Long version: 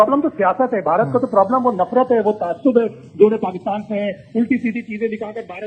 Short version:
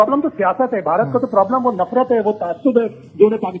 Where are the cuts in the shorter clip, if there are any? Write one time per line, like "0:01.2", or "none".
none